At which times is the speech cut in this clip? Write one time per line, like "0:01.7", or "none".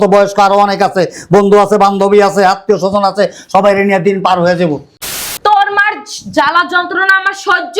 0:04.9